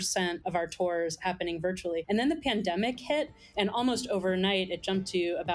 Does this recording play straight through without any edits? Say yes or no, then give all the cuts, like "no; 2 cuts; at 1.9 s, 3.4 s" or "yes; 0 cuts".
no; 2 cuts; at 2.0 s, 3.5 s